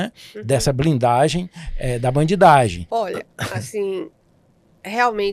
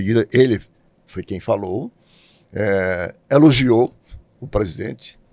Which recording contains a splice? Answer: first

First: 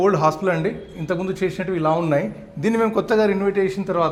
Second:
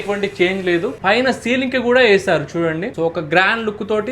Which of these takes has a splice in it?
second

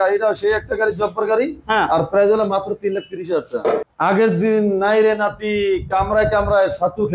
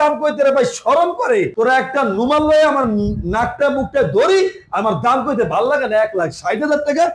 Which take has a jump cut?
first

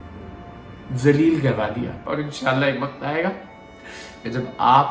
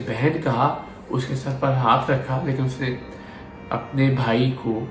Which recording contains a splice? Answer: first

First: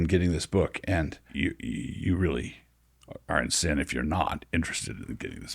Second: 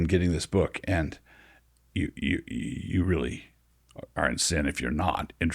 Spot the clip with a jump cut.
first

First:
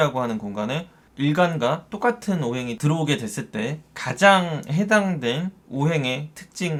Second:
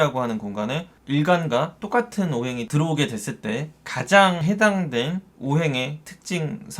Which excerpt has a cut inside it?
second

